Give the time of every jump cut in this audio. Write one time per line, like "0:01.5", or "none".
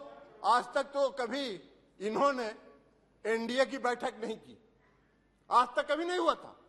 none